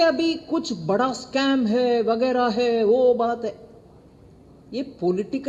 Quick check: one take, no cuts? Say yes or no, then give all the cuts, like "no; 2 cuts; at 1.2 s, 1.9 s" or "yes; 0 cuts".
yes; 0 cuts